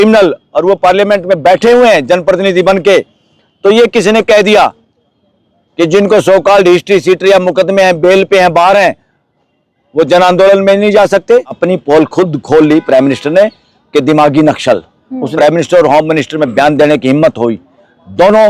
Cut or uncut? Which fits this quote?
cut